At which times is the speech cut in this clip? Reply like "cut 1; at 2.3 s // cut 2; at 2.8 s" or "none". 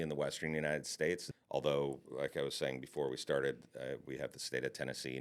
cut 1; at 1.3 s